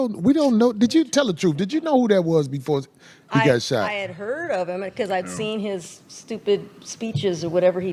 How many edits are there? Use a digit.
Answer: 0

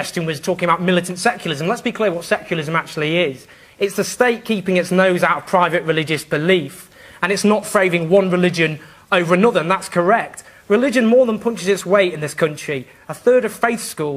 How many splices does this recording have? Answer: 1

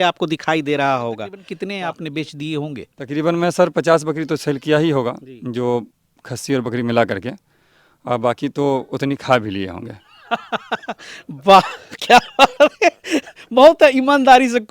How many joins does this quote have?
1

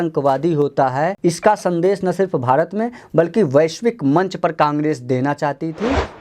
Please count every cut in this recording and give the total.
1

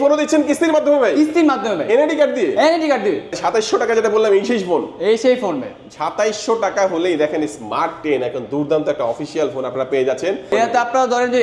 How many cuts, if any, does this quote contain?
2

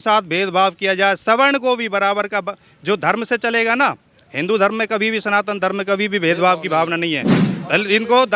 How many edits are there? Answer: 1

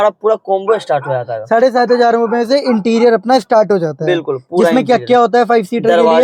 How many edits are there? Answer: 0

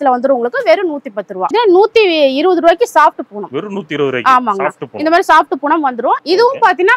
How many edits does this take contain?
2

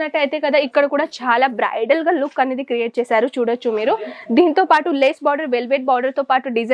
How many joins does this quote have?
0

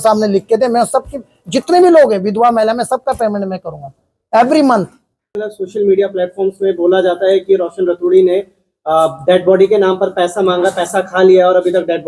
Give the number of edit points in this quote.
1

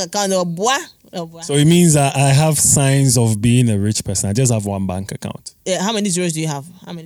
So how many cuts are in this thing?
1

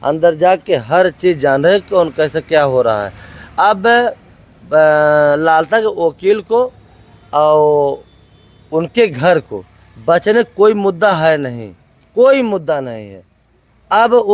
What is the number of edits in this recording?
0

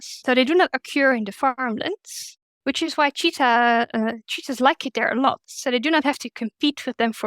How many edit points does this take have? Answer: 0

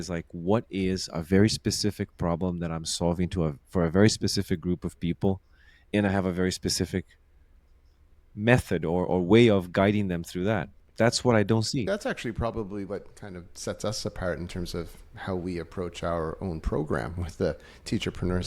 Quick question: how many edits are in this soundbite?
1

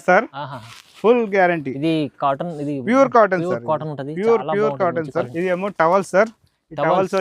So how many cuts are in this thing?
1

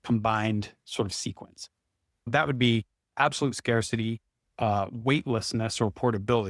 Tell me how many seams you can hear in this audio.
1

